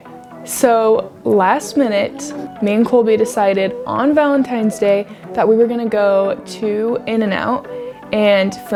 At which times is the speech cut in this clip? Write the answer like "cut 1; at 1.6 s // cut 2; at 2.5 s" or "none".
none

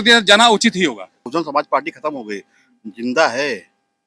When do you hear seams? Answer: cut 1; at 1.3 s

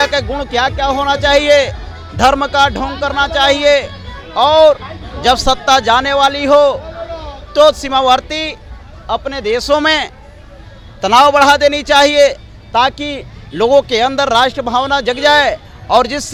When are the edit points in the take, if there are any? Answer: none

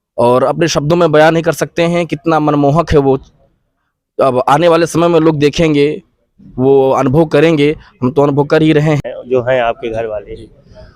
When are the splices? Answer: cut 1; at 9.0 s

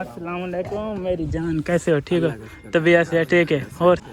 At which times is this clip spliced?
none

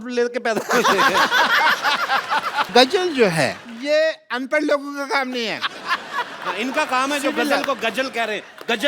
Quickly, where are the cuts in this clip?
cut 1; at 2.7 s

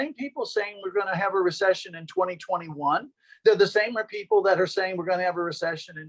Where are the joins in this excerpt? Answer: none

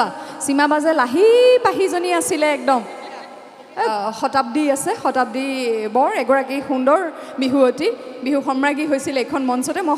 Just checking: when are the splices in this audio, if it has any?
cut 1; at 3.9 s

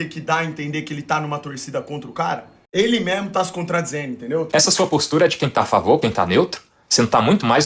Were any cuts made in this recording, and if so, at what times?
cut 1; at 2.5 s // cut 2; at 4.5 s

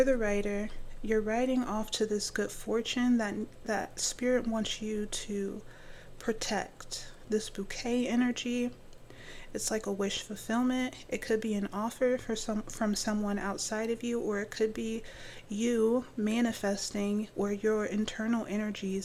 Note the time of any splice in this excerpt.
none

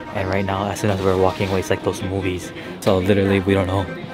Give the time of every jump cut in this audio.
cut 1; at 2.7 s

